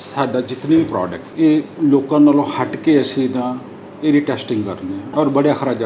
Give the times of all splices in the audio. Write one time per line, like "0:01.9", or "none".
0:01.2
0:05.1